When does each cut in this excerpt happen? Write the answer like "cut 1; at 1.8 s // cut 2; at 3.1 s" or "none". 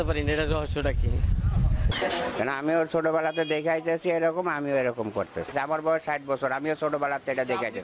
none